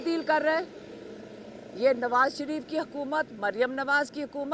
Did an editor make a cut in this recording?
no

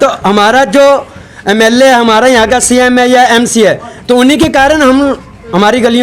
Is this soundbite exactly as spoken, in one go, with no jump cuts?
yes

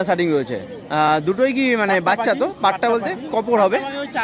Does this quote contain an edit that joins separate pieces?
no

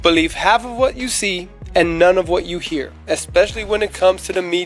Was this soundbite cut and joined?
no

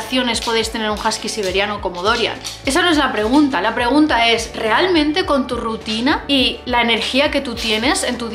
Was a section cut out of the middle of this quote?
no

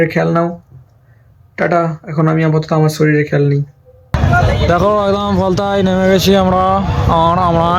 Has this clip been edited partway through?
yes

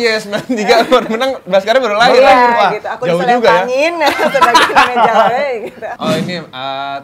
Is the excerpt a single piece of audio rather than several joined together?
no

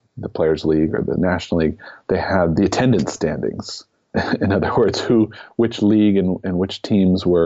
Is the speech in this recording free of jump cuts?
no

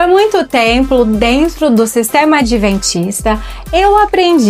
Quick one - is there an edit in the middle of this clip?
no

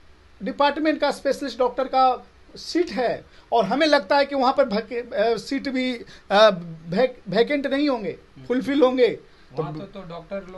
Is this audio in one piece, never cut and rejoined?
yes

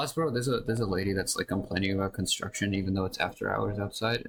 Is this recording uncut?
yes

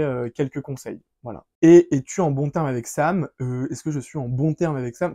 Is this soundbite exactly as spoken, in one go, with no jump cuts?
no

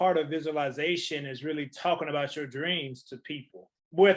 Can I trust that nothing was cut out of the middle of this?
yes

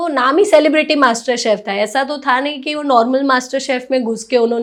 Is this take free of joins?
yes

